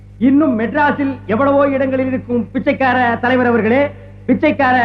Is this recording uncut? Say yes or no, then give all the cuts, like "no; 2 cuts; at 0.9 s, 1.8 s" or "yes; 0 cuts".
no; 1 cut; at 3.8 s